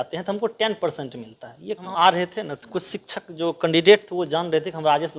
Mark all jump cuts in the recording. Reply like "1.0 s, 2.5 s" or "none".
1.9 s